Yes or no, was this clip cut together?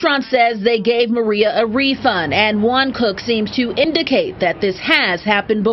no